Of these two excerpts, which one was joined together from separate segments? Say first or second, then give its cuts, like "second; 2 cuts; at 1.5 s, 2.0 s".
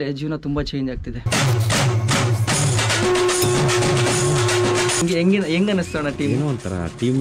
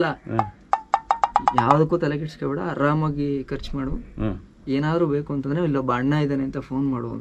first; 2 cuts; at 1.2 s, 5.0 s